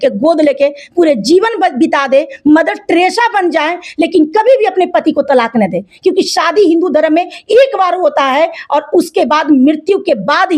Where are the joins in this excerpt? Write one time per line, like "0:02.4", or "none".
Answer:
none